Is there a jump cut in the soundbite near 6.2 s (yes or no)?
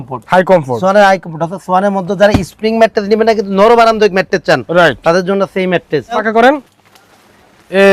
yes